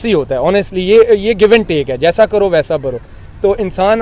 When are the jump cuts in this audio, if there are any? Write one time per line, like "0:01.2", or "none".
none